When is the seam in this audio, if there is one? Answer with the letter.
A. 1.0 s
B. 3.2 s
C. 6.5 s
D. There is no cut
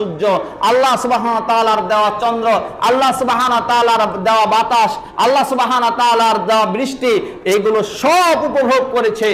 D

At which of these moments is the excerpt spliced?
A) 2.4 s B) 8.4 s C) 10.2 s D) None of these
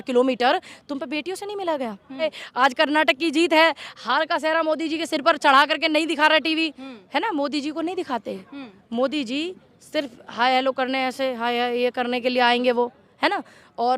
A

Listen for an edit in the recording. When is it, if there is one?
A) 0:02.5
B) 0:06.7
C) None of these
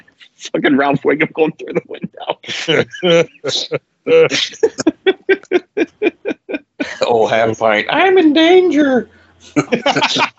A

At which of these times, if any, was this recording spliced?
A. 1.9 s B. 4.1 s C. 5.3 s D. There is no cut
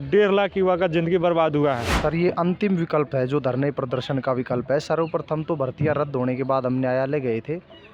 A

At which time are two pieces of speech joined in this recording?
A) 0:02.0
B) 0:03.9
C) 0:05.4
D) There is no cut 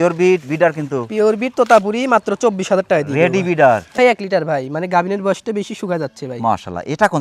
B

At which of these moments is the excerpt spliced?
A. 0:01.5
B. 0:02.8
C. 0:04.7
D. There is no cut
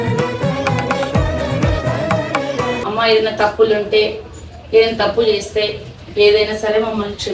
B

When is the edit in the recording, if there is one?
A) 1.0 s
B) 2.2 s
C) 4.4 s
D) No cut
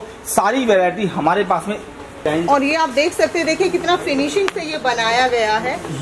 B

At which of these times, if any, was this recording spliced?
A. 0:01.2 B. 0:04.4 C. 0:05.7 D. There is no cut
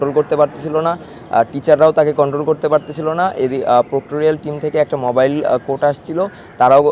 D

